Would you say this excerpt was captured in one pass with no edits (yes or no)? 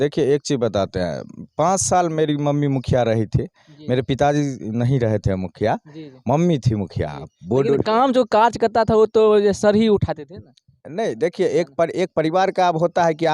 yes